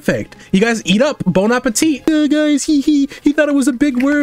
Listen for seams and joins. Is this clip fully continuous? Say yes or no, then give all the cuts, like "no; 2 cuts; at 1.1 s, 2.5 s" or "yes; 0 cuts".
no; 1 cut; at 2.0 s